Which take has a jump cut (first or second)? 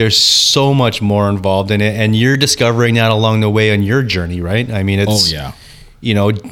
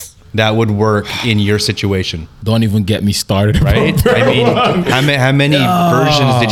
first